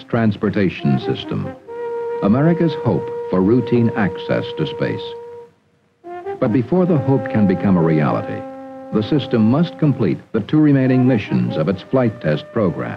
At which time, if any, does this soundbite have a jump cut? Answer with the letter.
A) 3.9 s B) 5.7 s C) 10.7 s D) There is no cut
D